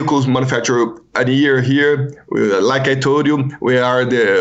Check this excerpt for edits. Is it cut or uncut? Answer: uncut